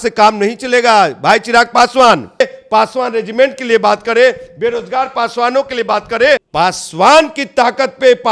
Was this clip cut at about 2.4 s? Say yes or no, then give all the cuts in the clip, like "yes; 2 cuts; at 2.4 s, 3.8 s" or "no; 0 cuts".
yes; 2 cuts; at 2.4 s, 6.5 s